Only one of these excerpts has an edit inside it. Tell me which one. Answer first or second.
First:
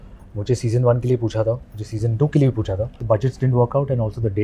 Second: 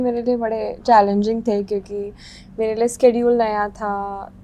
first